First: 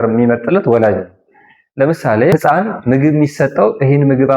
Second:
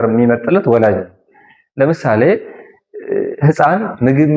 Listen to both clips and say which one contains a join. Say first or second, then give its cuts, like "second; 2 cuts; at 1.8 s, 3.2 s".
first; 1 cut; at 2.3 s